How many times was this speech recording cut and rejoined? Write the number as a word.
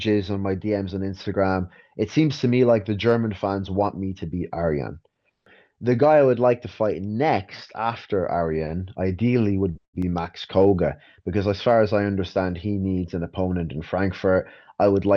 one